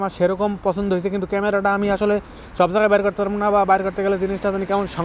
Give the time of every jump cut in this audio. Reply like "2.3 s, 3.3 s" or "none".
none